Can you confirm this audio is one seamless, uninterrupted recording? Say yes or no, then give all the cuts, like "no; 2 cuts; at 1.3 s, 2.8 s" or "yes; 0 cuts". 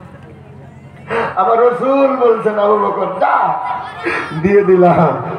yes; 0 cuts